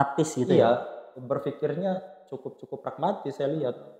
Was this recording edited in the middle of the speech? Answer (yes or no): no